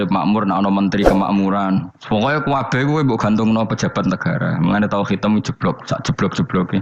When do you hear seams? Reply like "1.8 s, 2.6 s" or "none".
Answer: none